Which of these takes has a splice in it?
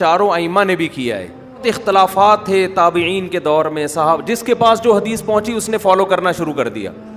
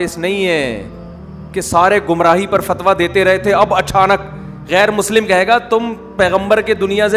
first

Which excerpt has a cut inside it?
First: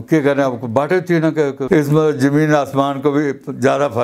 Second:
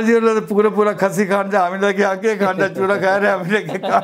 first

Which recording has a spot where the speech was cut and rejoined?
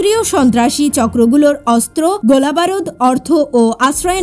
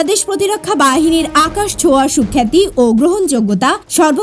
first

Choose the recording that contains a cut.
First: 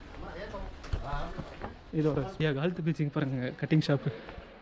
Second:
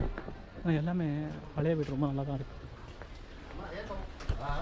first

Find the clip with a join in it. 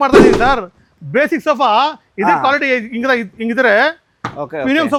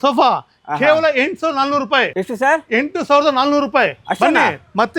second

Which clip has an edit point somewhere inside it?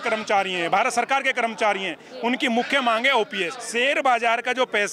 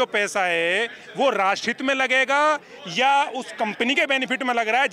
first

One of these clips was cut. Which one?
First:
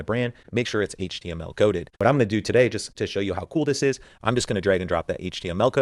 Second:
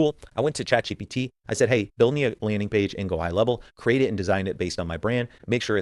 first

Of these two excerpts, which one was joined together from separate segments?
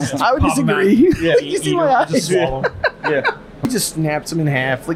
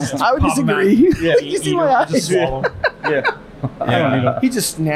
first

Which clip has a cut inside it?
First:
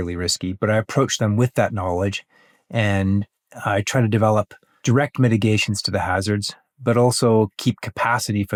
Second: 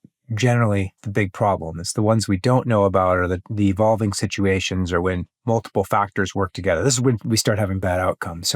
second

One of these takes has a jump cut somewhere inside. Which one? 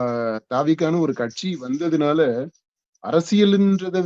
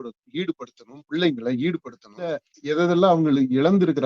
second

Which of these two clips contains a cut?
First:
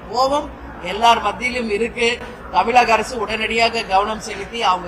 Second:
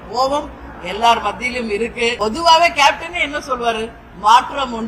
second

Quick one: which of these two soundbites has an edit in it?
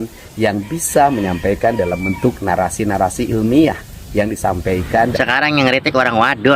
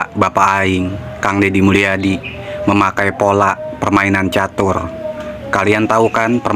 first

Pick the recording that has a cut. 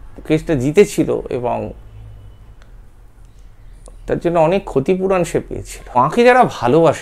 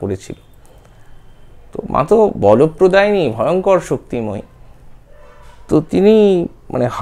first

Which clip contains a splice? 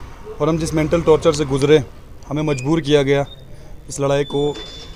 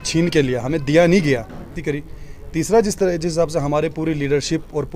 second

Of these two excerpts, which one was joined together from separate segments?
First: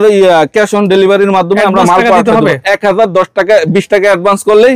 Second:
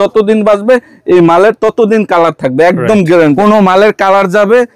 second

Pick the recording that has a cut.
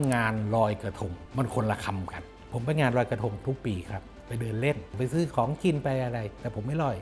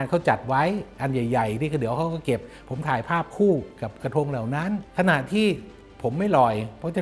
first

